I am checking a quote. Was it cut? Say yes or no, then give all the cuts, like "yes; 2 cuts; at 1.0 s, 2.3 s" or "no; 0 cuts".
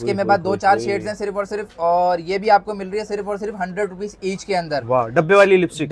no; 0 cuts